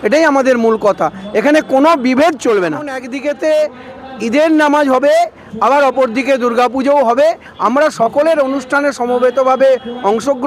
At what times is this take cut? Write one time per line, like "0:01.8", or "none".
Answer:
0:03.0